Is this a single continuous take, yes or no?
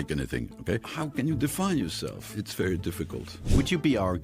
no